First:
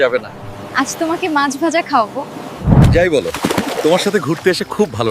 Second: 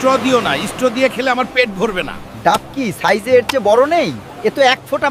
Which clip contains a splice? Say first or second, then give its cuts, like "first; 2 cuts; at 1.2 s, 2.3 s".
first; 1 cut; at 2.7 s